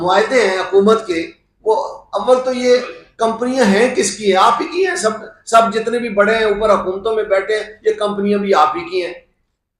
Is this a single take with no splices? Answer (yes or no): yes